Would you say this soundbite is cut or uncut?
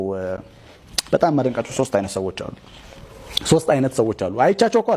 uncut